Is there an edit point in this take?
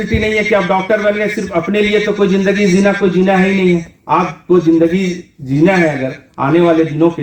no; 0 cuts

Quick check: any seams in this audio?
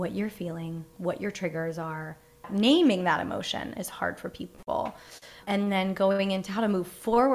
yes; 2 cuts; at 2.5 s, 5.4 s

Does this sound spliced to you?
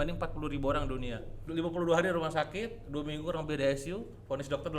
yes; 1 cut; at 1.4 s

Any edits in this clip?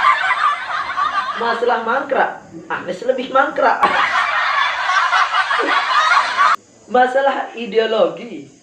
yes; 1 cut; at 1.3 s

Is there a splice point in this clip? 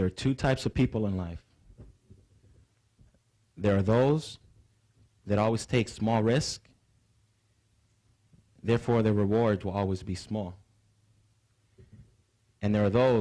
no; 0 cuts

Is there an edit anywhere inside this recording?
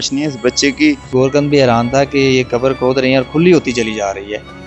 yes; 1 cut; at 1.1 s

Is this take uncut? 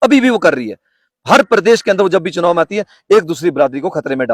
yes; 0 cuts

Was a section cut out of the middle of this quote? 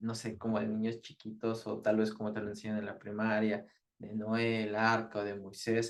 no; 0 cuts

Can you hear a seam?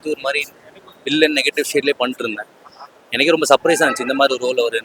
no; 0 cuts

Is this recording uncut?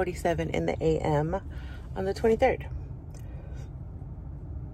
yes; 0 cuts

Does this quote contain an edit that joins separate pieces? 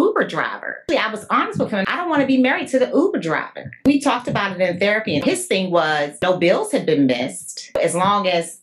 yes; 6 cuts; at 0.8 s, 1.9 s, 3.8 s, 5.2 s, 6.2 s, 7.7 s

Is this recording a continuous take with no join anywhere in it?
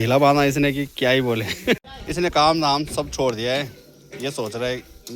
no; 1 cut; at 1.8 s

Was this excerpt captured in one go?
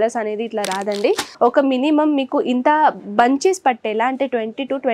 no; 1 cut; at 1.3 s

